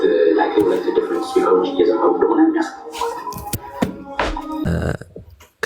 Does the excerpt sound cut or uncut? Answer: cut